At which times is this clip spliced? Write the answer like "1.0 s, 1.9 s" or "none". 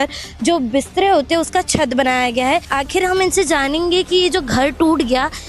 2.7 s